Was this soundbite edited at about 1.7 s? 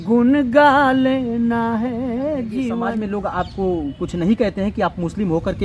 no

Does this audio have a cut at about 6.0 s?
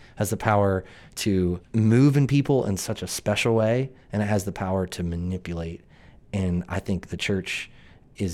no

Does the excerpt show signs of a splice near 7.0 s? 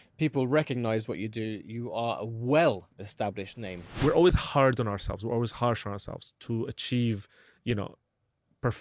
no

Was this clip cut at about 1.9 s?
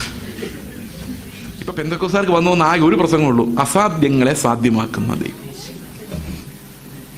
yes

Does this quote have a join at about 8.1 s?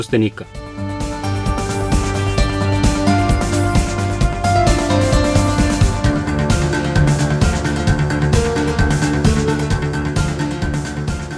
yes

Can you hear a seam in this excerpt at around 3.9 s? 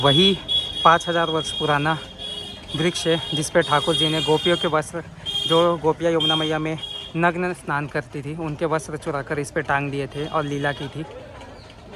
no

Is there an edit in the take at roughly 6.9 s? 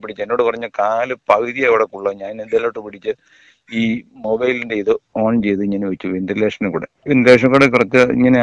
yes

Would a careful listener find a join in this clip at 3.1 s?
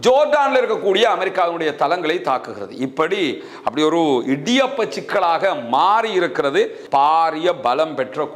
no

